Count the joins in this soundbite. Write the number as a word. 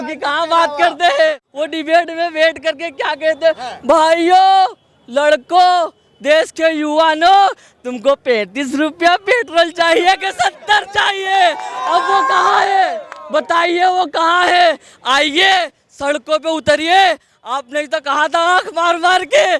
one